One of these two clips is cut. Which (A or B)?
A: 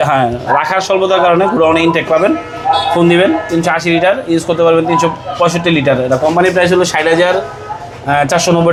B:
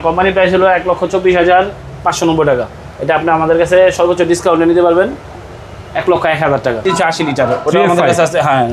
B